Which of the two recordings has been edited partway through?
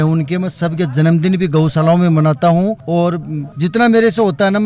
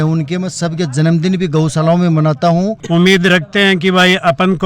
second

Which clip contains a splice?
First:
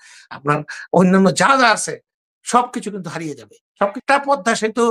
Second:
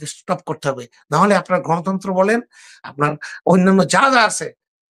first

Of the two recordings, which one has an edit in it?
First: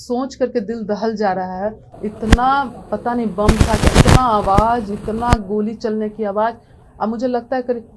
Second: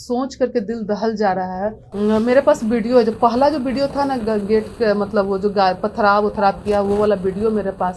second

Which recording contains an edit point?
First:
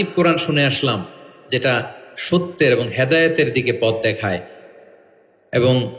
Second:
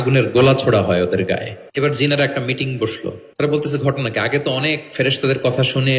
second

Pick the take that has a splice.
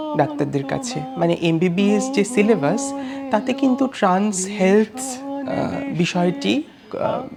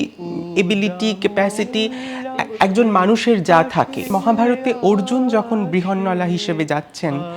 second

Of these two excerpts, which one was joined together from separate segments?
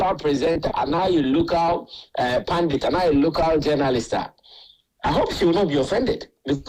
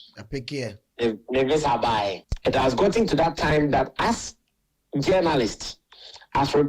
second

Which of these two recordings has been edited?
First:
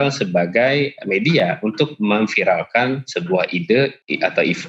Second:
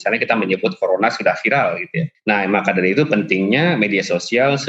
second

